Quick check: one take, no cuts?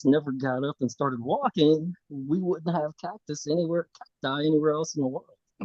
yes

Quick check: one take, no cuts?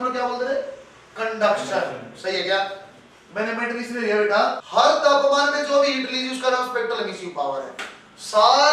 no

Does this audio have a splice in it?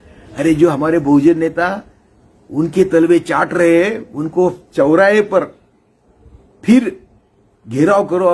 no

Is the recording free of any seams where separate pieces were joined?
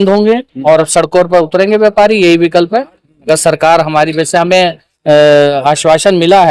yes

